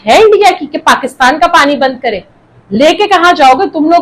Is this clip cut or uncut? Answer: uncut